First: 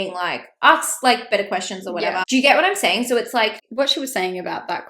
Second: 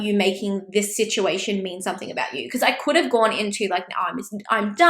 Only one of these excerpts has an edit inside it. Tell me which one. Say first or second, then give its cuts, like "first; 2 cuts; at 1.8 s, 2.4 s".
first; 2 cuts; at 2.2 s, 3.6 s